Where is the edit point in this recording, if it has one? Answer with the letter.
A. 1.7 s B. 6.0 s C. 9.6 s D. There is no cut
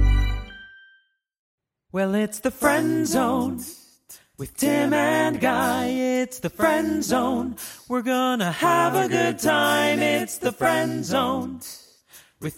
A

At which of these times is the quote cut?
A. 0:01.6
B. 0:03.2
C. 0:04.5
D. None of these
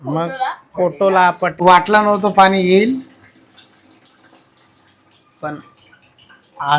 A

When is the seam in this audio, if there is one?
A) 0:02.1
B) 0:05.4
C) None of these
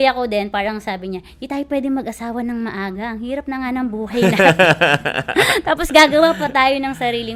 C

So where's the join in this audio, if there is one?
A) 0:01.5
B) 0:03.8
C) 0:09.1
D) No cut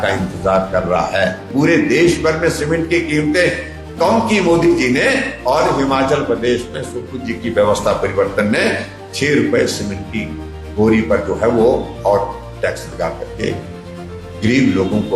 A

